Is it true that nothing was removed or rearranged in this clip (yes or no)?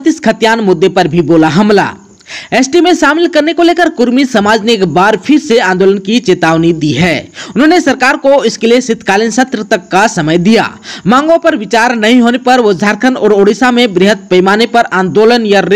yes